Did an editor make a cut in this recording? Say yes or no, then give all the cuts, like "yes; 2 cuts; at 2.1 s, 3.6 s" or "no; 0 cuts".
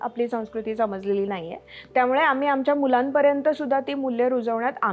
no; 0 cuts